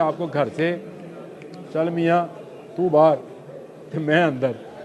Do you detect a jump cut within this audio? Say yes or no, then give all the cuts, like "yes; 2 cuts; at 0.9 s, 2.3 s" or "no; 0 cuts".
no; 0 cuts